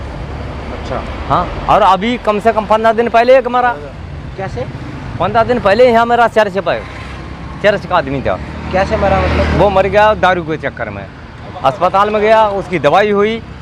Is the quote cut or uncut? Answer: uncut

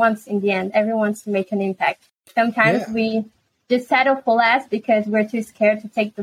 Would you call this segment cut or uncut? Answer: uncut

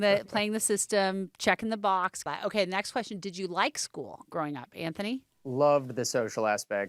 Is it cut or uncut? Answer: cut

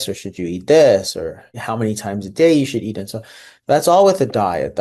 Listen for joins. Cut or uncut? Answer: uncut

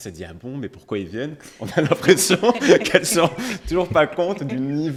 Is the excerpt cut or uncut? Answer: uncut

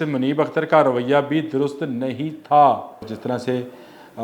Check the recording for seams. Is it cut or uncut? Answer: cut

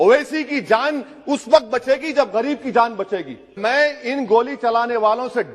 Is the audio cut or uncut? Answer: cut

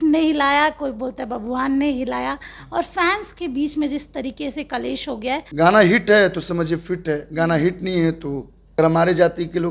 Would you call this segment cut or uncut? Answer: cut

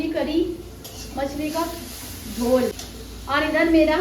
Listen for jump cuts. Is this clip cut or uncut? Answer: uncut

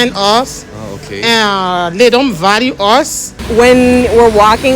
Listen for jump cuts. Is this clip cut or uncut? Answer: cut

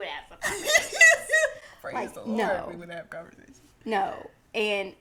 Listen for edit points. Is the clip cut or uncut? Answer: uncut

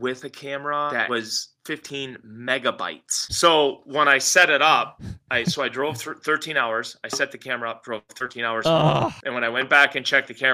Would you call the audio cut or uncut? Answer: cut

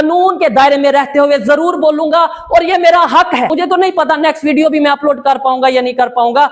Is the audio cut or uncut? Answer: cut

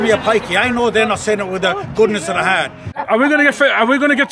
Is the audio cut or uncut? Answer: cut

